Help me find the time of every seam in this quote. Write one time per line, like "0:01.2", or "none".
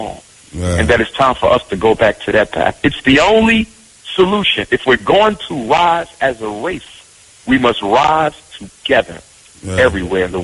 none